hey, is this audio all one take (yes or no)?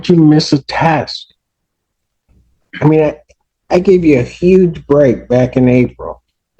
yes